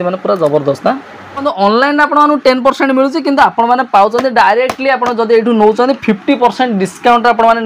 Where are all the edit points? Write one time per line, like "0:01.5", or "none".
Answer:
0:01.4